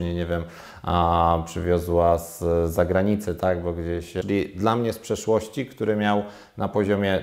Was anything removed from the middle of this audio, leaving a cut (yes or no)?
yes